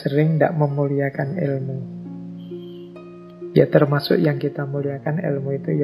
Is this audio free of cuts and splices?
no; 2 cuts; at 1.7 s, 3.5 s

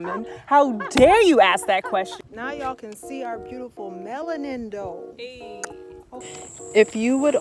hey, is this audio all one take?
no; 2 cuts; at 2.1 s, 6.3 s

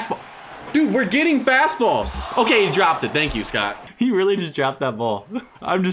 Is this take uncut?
no; 1 cut; at 3.8 s

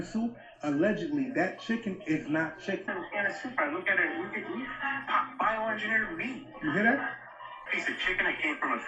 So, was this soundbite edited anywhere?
yes; 2 cuts; at 2.9 s, 7.7 s

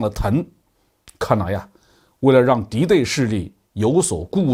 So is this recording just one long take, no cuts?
yes; 0 cuts

